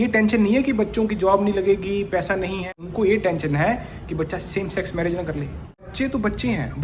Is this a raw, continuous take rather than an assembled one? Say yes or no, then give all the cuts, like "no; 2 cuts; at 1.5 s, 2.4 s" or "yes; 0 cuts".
no; 2 cuts; at 2.7 s, 5.9 s